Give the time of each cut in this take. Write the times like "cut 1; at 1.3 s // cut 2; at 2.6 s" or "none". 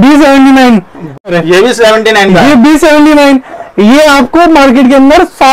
cut 1; at 1.3 s